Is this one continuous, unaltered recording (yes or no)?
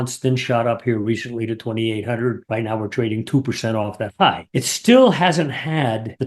yes